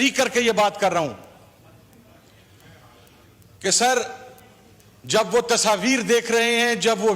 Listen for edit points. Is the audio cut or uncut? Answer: uncut